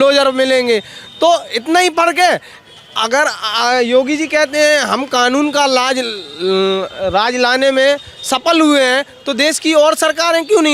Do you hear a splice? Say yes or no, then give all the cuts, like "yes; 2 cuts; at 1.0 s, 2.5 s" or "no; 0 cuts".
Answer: no; 0 cuts